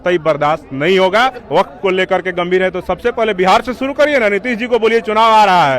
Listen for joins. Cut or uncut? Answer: cut